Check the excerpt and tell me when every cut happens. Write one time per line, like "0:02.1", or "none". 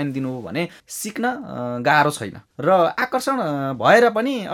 none